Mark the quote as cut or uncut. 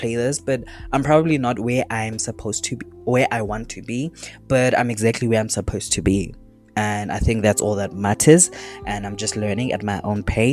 uncut